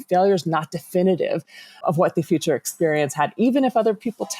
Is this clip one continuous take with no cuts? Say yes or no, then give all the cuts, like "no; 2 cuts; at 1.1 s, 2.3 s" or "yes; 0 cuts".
no; 1 cut; at 1.8 s